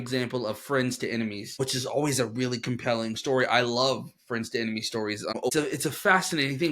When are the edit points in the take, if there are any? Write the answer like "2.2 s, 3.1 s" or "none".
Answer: 1.6 s, 5.5 s